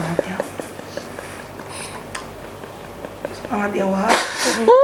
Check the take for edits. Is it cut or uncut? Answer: uncut